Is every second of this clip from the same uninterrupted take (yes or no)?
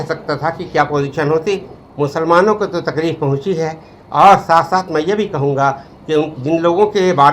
no